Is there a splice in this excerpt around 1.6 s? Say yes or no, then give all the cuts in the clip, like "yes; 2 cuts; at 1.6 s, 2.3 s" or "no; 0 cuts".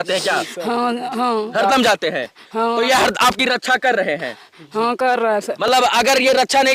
no; 0 cuts